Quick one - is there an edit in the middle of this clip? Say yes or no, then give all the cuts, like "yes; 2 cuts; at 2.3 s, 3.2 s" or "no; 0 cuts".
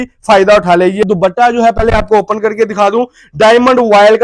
yes; 1 cut; at 1.0 s